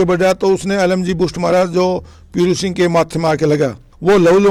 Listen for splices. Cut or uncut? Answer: uncut